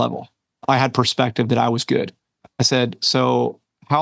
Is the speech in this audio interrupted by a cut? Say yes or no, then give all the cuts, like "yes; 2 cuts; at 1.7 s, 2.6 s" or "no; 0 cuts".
no; 0 cuts